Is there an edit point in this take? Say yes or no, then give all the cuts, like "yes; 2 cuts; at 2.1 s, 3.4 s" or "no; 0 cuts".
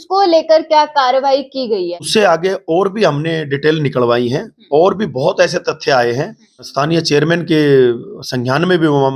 yes; 2 cuts; at 2.1 s, 6.7 s